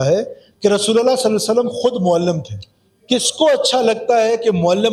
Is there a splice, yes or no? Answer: no